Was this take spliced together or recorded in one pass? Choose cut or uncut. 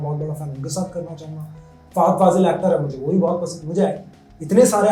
uncut